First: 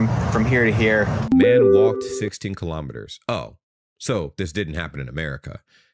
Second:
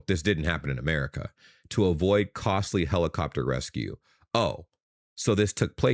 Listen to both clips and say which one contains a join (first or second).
first